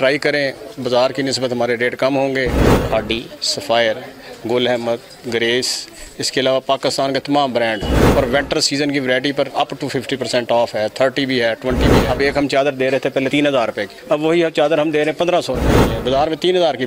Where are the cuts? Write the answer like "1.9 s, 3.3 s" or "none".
2.6 s, 9.5 s, 12.0 s, 13.4 s, 15.9 s